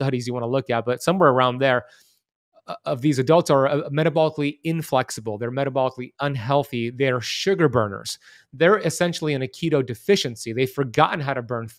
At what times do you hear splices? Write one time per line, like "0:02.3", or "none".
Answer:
none